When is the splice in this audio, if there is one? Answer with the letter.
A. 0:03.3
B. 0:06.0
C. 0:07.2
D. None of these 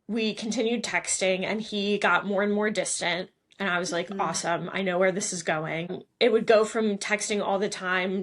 B